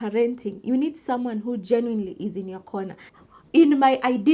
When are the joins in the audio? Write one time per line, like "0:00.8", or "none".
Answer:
0:03.1